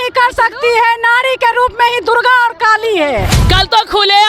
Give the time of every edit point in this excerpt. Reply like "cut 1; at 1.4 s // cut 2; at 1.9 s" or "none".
cut 1; at 3.4 s